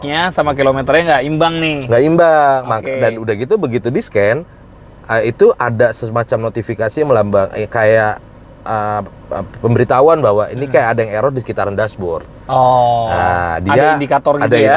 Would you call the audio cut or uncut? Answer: uncut